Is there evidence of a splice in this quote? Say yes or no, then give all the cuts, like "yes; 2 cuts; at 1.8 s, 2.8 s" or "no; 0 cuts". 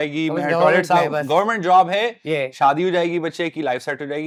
no; 0 cuts